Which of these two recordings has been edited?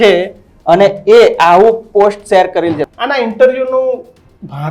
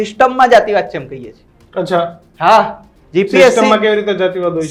first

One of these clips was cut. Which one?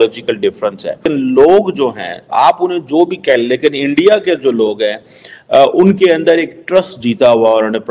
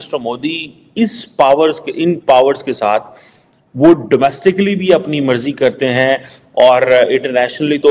first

